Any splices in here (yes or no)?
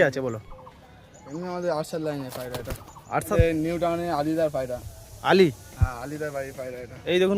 yes